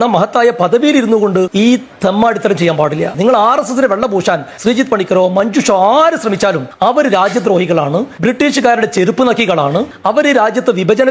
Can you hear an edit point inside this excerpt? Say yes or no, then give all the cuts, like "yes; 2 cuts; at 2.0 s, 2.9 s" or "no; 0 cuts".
yes; 4 cuts; at 1.5 s, 4.5 s, 6.7 s, 8.1 s